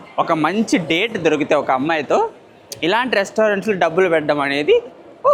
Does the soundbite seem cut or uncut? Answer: uncut